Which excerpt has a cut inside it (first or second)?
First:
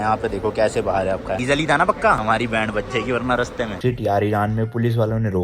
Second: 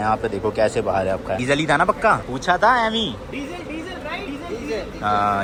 first